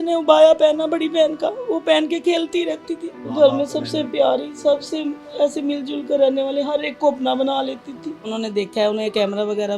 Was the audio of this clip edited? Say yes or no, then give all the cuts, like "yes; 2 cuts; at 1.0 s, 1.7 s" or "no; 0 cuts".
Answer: yes; 2 cuts; at 3.2 s, 8.3 s